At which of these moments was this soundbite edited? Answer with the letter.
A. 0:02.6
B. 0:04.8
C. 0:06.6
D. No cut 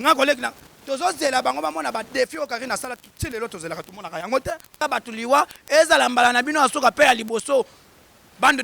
B